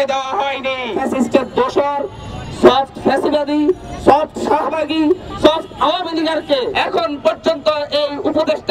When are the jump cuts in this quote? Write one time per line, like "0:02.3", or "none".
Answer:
0:00.9
0:06.8